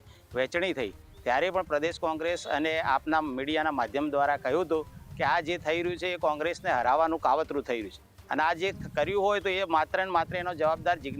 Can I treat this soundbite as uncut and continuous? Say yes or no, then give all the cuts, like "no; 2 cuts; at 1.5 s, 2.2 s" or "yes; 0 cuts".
yes; 0 cuts